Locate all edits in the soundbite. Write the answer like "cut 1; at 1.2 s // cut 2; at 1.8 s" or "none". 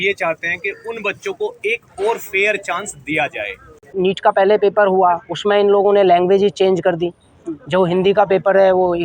cut 1; at 3.9 s